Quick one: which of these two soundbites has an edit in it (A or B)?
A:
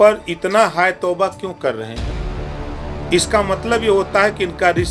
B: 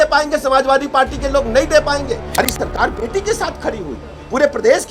B